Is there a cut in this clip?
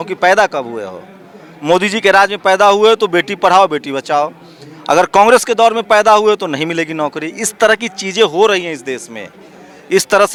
no; 0 cuts

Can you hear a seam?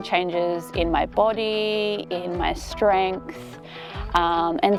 no; 0 cuts

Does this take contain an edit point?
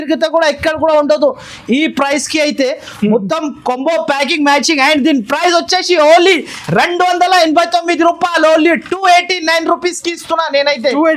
no; 0 cuts

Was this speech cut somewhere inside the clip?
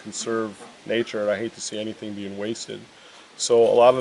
no; 0 cuts

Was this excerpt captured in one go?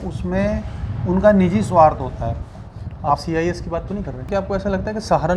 no; 1 cut; at 4.3 s

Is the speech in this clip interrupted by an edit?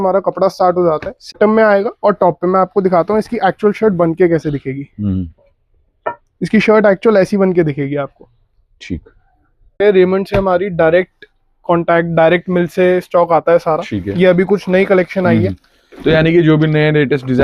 yes; 2 cuts; at 1.3 s, 9.7 s

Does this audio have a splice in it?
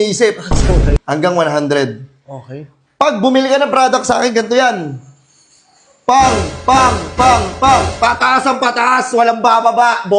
yes; 1 cut; at 1.0 s

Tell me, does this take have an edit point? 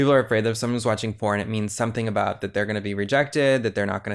no; 0 cuts

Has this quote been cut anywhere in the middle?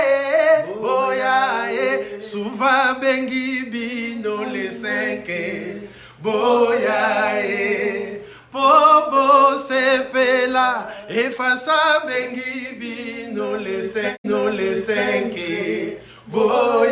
yes; 1 cut; at 14.2 s

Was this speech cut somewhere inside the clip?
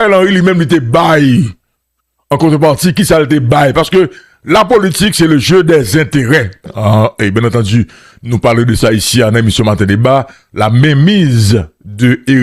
yes; 1 cut; at 6.6 s

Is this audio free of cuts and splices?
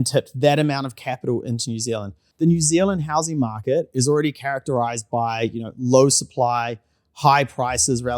no; 1 cut; at 2.2 s

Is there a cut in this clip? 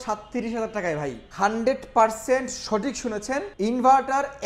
yes; 2 cuts; at 1.2 s, 3.5 s

